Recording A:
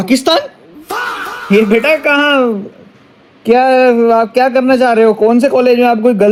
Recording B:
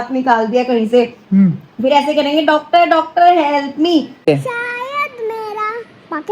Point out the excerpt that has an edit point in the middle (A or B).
B